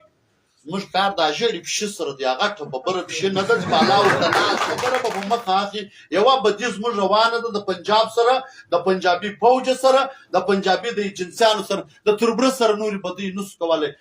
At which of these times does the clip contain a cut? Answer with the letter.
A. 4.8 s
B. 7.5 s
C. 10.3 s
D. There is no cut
A